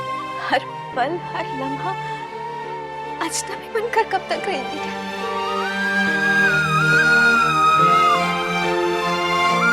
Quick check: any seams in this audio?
no; 0 cuts

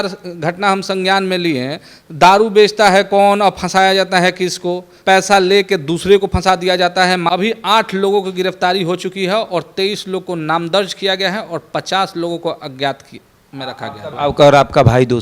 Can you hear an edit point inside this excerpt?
yes; 3 cuts; at 4.9 s, 7.3 s, 14.1 s

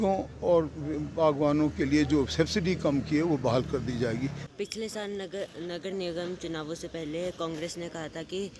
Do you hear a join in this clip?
yes; 1 cut; at 4.4 s

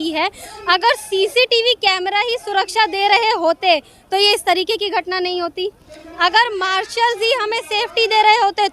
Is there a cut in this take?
no; 0 cuts

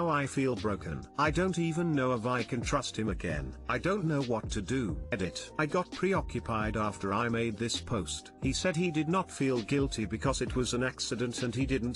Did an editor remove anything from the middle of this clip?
yes; 1 cut; at 5.1 s

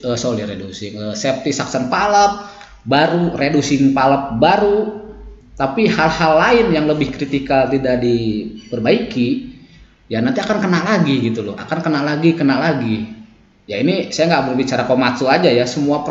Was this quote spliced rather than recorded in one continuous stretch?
no; 0 cuts

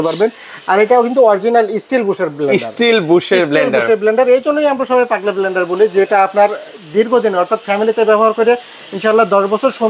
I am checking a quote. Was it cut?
no; 0 cuts

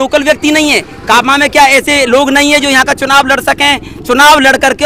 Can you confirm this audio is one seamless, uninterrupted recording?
yes; 0 cuts

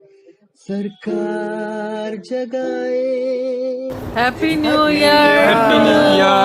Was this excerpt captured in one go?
no; 1 cut; at 4.0 s

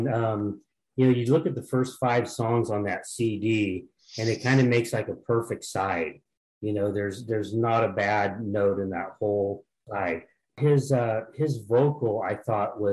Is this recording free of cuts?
no; 1 cut; at 10.5 s

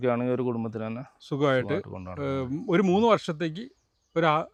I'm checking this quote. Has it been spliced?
no; 0 cuts

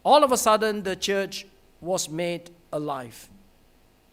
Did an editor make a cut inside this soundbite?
no; 0 cuts

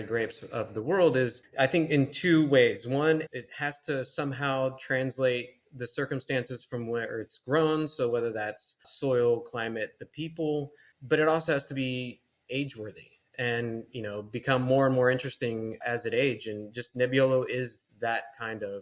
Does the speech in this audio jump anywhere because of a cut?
no; 0 cuts

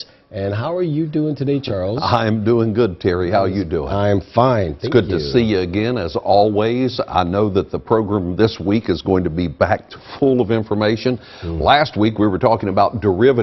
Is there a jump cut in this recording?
yes; 1 cut; at 7.7 s

